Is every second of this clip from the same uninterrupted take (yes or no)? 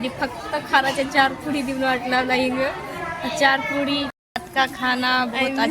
no